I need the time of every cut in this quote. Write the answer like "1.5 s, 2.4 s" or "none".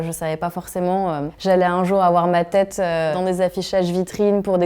1.3 s